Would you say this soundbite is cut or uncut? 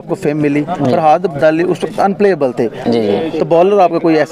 cut